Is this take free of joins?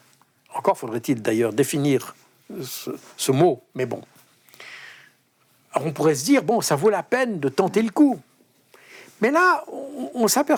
yes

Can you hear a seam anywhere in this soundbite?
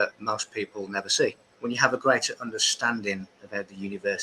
yes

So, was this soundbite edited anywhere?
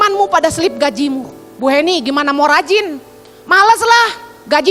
no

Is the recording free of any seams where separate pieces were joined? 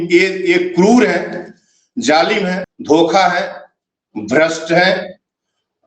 no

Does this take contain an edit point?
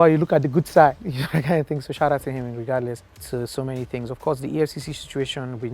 yes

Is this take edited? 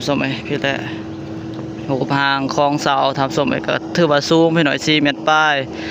no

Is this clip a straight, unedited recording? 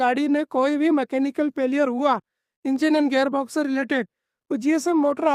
yes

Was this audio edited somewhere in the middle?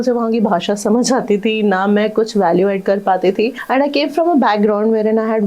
no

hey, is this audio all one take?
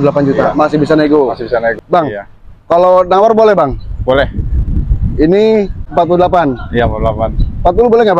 no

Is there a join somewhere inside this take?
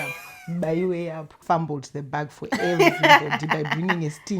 yes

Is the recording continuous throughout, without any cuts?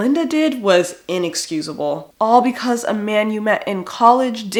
yes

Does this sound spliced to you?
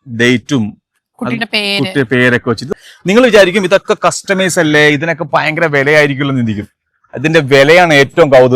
yes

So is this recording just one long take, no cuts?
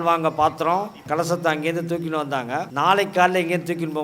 no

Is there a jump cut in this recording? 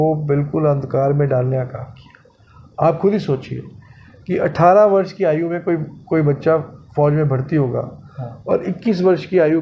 no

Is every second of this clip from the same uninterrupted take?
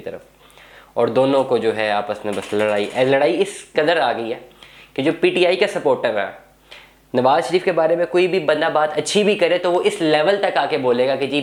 yes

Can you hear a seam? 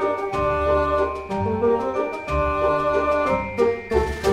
yes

